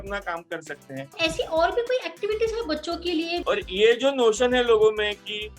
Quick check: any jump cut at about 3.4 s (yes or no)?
yes